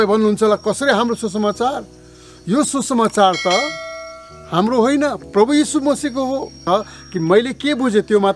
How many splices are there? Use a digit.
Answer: 1